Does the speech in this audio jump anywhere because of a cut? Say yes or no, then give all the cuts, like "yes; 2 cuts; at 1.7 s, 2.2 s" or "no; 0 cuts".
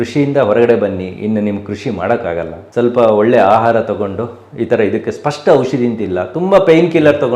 yes; 1 cut; at 2.6 s